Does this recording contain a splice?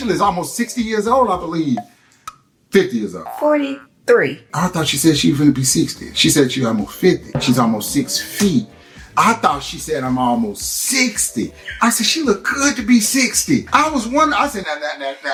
no; 0 cuts

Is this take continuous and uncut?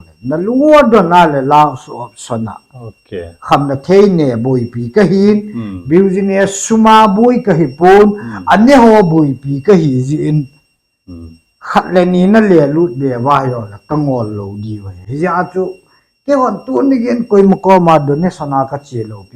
yes; 0 cuts

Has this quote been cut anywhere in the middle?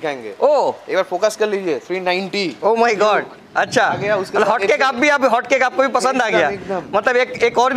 no; 0 cuts

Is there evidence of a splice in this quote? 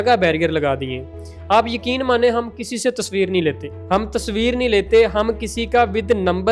yes; 1 cut; at 3.7 s

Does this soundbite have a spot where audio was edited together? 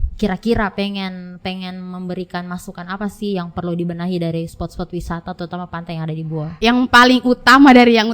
yes; 1 cut; at 6.6 s

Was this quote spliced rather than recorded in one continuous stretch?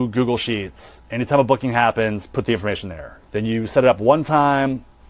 no; 0 cuts

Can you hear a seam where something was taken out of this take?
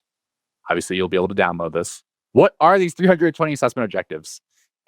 yes; 1 cut; at 2.2 s

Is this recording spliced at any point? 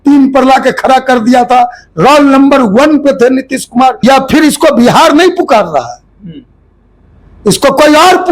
yes; 1 cut; at 4.0 s

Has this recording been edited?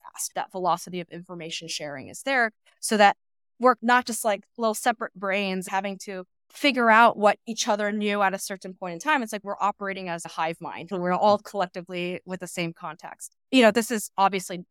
yes; 3 cuts; at 3.8 s, 5.7 s, 10.9 s

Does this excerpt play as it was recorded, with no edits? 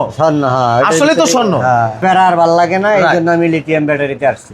no; 1 cut; at 2.0 s

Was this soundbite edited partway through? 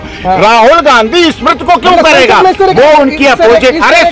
no; 0 cuts

